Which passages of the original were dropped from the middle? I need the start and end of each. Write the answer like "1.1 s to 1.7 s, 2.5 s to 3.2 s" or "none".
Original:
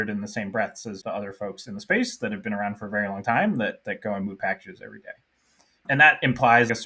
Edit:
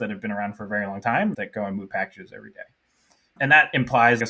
3.6 s to 3.8 s